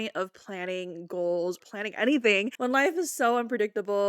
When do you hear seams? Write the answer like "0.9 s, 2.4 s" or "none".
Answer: 1.6 s, 2.5 s